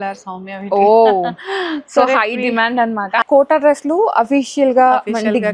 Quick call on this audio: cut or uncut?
cut